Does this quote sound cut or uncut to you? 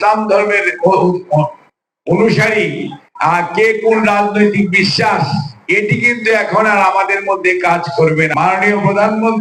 cut